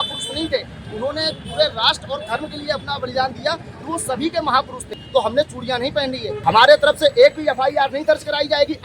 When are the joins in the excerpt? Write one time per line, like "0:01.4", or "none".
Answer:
0:05.0
0:06.3